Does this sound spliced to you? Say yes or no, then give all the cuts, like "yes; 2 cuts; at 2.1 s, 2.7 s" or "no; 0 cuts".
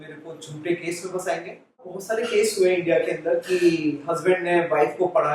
yes; 1 cut; at 2.0 s